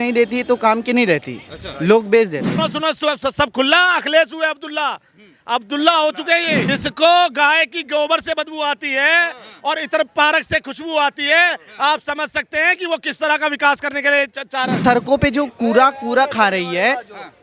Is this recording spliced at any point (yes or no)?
yes